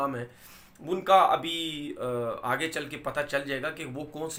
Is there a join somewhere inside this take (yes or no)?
no